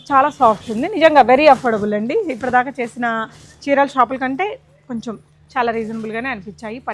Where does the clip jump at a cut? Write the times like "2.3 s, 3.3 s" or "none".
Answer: none